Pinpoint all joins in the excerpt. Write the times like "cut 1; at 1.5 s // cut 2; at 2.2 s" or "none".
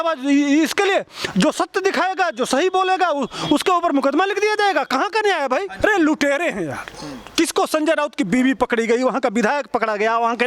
cut 1; at 5.7 s